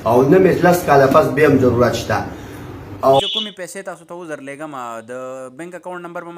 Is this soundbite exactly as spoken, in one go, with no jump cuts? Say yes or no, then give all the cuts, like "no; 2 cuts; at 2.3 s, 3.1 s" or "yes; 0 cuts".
no; 1 cut; at 3.2 s